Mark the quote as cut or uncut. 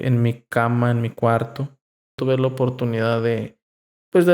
cut